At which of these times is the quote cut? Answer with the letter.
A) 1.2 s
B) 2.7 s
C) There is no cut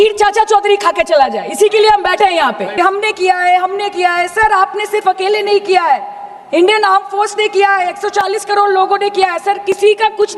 B